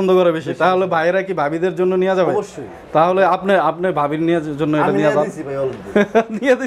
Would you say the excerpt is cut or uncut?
uncut